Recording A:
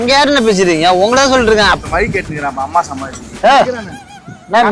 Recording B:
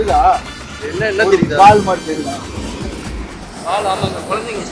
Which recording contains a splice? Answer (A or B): A